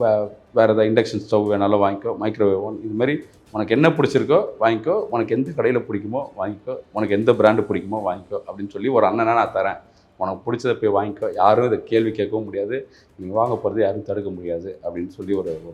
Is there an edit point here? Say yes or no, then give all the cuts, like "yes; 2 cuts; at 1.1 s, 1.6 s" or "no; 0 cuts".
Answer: no; 0 cuts